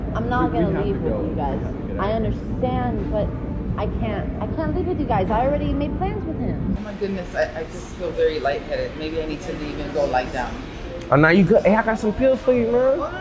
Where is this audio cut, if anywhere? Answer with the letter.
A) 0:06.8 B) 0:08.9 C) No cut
A